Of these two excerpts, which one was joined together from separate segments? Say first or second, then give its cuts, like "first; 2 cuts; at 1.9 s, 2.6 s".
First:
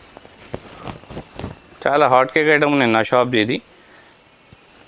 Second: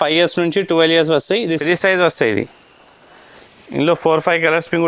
second; 1 cut; at 1.5 s